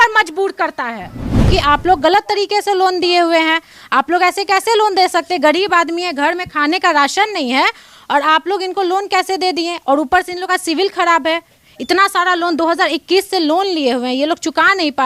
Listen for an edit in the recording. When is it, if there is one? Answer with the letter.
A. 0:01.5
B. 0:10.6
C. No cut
A